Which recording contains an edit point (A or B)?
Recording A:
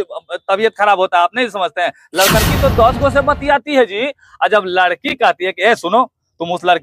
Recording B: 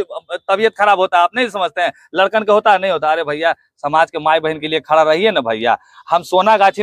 A